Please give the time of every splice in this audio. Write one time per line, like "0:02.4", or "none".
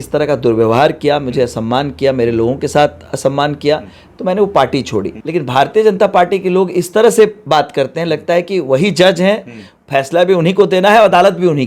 0:05.2